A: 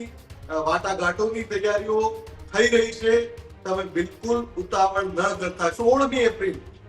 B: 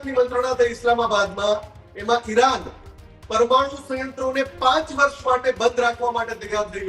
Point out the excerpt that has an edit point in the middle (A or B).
A